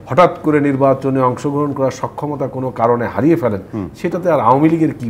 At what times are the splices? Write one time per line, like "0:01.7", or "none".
none